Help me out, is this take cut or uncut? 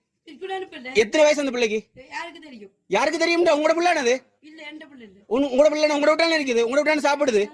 cut